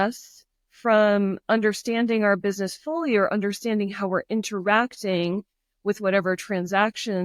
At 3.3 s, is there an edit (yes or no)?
no